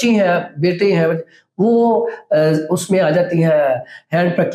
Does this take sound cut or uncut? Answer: uncut